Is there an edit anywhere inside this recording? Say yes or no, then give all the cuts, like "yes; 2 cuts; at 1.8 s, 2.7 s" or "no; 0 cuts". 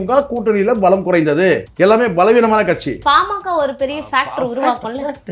yes; 2 cuts; at 1.7 s, 3.0 s